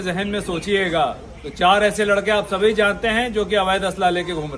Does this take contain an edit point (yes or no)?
yes